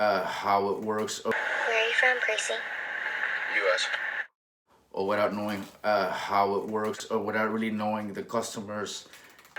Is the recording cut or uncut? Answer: uncut